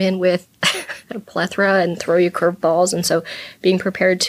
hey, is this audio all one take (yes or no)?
no